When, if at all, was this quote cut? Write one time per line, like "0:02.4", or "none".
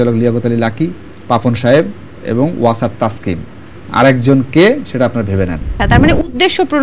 0:01.1
0:05.8